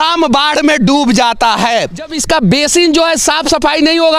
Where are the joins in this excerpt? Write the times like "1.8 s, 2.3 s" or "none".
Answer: 2.2 s